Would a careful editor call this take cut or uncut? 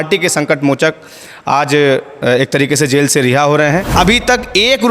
cut